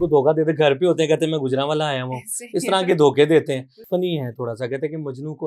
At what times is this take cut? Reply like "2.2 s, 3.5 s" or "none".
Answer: 3.7 s